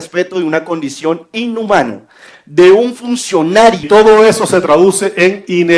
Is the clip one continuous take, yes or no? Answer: no